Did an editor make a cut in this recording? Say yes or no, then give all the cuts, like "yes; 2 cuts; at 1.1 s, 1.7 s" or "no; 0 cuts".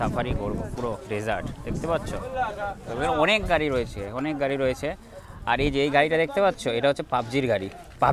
no; 0 cuts